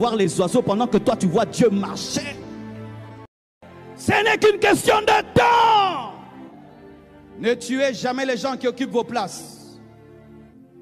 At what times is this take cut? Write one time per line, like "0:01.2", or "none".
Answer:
0:03.5